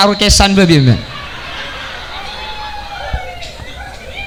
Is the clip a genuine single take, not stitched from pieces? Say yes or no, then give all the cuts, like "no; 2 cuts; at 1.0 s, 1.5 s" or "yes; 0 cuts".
yes; 0 cuts